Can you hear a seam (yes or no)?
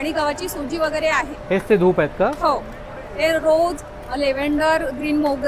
no